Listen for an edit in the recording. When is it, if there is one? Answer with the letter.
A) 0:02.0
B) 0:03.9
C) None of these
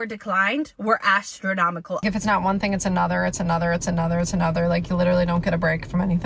A